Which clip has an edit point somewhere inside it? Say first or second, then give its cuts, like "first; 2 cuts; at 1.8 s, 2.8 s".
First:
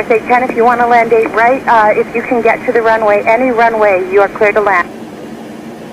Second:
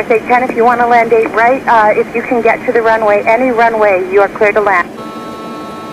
second; 1 cut; at 5.0 s